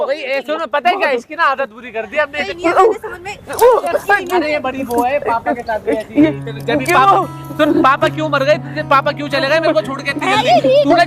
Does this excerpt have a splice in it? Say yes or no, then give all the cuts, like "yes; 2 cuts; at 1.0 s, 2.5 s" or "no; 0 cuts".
yes; 1 cut; at 2.4 s